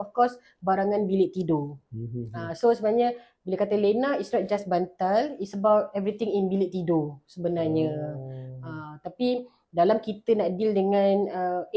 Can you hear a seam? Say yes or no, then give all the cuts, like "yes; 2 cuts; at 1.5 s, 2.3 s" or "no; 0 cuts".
no; 0 cuts